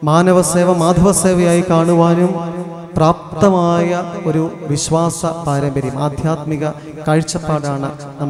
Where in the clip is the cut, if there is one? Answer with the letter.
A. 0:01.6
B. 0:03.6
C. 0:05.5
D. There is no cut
D